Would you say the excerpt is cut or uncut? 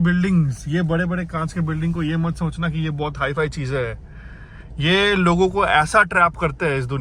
uncut